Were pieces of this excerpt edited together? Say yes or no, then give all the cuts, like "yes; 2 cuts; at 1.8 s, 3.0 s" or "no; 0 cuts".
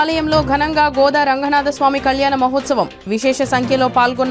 no; 0 cuts